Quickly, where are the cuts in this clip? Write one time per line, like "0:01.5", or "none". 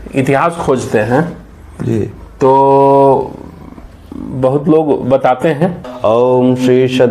0:05.9